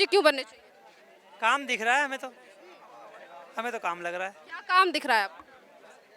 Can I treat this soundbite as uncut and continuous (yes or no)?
yes